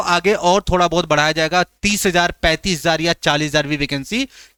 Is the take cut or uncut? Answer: uncut